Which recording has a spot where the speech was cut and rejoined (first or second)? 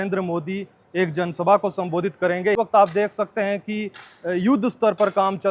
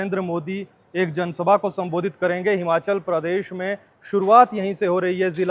first